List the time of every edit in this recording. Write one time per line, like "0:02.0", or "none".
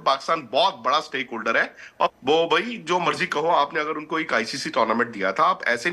0:02.1